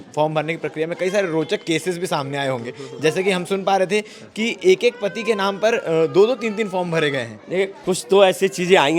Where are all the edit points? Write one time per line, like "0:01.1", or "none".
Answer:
none